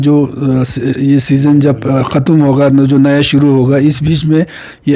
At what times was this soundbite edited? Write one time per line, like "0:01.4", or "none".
none